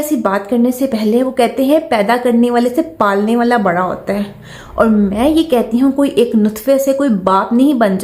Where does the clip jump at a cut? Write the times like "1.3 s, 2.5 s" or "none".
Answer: none